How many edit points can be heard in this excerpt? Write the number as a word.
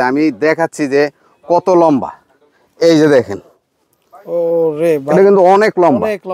zero